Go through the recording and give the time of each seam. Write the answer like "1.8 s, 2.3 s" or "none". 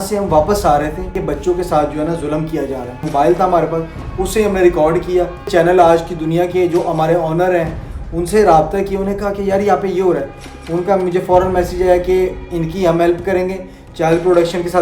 1.2 s, 3.0 s, 5.5 s